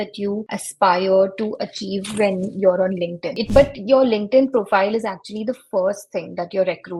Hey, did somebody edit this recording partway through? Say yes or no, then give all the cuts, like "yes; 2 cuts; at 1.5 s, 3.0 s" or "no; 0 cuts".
yes; 1 cut; at 3.5 s